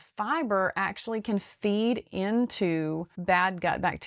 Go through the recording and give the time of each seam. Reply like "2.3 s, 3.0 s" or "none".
3.1 s